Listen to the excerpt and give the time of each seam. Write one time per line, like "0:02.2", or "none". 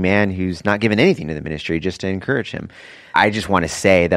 0:03.1